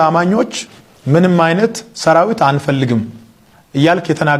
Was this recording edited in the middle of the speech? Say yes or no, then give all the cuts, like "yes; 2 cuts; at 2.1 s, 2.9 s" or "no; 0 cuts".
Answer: no; 0 cuts